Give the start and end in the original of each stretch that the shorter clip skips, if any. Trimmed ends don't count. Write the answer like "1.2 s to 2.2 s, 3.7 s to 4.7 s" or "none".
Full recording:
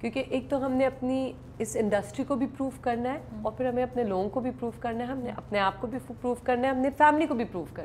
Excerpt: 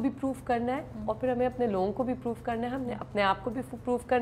none